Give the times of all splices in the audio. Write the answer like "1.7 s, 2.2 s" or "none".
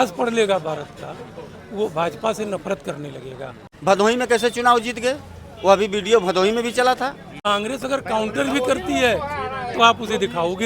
3.7 s, 7.5 s